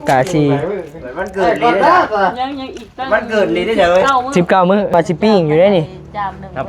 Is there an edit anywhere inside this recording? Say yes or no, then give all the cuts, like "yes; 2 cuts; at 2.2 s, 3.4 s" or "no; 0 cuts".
yes; 1 cut; at 4.9 s